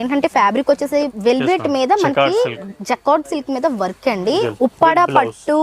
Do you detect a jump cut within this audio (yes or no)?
yes